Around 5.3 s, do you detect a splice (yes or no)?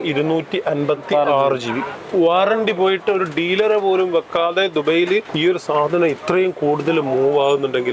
yes